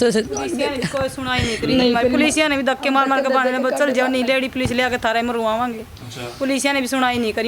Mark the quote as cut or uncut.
uncut